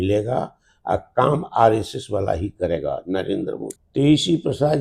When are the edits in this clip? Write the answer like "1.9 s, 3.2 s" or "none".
3.8 s